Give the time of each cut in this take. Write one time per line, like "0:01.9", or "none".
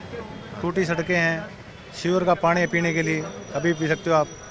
none